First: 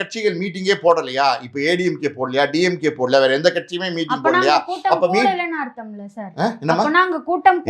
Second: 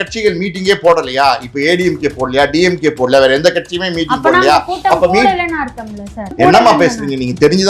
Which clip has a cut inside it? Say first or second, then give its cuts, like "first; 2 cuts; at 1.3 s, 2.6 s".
second; 1 cut; at 6.3 s